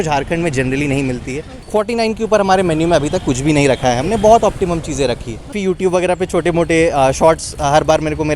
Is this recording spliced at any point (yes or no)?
yes